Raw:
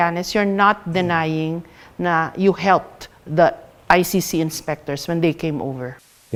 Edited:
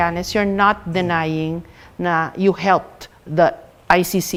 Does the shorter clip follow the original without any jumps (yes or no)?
yes